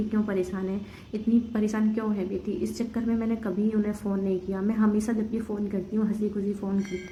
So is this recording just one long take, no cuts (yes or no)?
yes